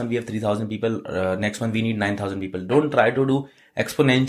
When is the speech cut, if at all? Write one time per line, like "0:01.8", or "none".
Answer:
none